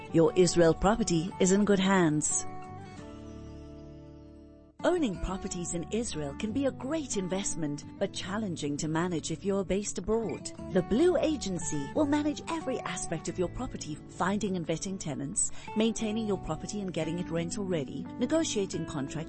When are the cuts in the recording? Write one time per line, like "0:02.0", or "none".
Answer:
0:02.3
0:04.6